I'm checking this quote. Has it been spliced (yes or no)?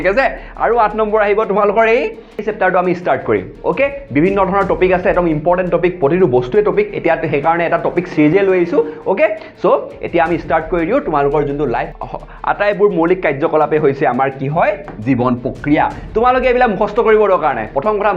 yes